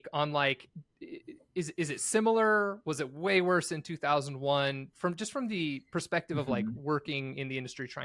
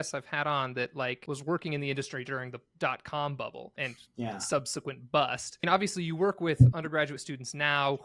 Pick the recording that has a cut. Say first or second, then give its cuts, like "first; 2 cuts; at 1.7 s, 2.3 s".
second; 3 cuts; at 1.2 s, 3.7 s, 5.6 s